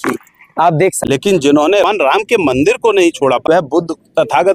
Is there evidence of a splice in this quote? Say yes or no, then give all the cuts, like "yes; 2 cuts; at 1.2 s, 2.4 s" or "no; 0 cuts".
yes; 3 cuts; at 1.0 s, 1.8 s, 3.4 s